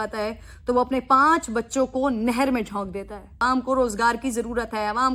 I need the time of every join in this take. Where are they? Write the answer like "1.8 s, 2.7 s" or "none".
3.4 s

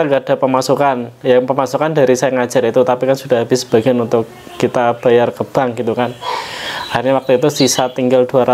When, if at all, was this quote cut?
none

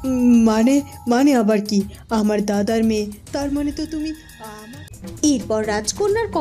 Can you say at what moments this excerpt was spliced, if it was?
4.6 s

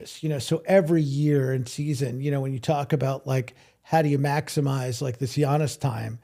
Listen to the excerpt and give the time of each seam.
none

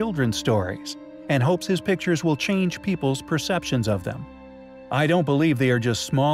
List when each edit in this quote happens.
none

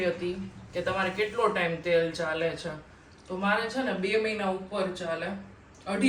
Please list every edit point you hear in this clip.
none

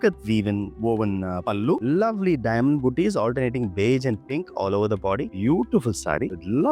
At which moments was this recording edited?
1.8 s, 5.3 s

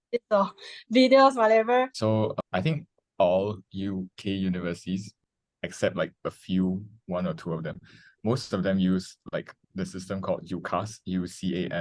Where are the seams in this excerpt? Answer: 2.1 s, 5.1 s

